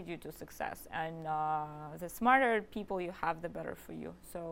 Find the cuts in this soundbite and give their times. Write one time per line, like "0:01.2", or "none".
none